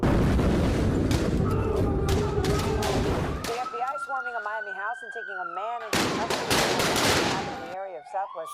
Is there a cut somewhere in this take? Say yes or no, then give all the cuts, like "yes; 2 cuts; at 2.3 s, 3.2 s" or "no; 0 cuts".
no; 0 cuts